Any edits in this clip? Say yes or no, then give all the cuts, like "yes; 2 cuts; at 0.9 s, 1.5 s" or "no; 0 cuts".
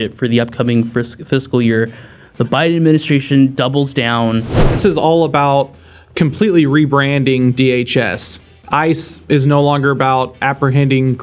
yes; 1 cut; at 4.7 s